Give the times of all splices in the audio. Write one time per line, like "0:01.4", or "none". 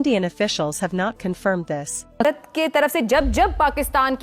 0:02.2